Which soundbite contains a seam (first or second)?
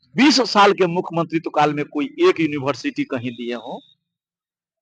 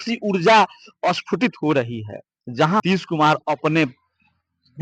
second